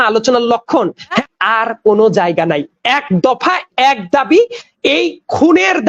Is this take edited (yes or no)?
yes